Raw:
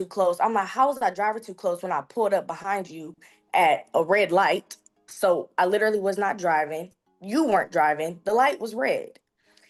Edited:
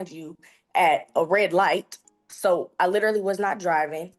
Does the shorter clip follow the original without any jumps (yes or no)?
yes